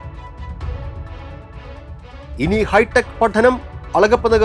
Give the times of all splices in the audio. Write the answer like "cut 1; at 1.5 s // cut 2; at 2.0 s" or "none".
cut 1; at 1.3 s // cut 2; at 2.1 s